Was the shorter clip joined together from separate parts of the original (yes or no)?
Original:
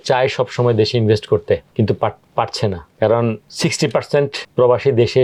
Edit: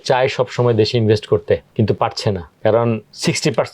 yes